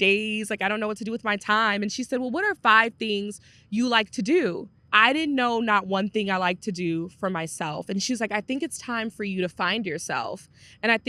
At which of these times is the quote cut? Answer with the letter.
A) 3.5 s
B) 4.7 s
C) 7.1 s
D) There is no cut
B